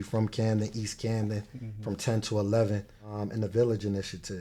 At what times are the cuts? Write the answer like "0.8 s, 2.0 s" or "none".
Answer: 3.0 s